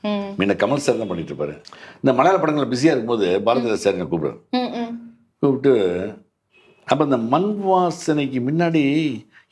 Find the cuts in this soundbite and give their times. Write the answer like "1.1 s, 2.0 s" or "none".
1.6 s